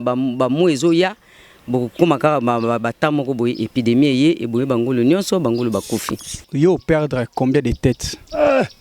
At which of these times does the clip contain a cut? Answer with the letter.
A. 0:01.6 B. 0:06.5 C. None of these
B